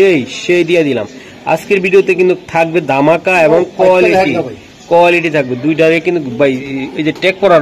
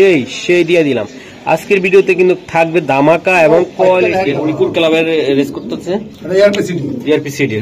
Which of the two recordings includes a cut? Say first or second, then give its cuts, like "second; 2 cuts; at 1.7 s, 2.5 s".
second; 1 cut; at 4.3 s